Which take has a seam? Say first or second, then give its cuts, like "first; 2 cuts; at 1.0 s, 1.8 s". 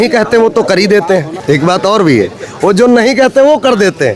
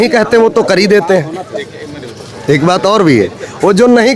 first; 1 cut; at 1.3 s